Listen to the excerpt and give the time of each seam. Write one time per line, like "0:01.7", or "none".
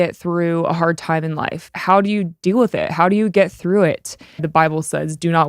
0:01.7
0:04.5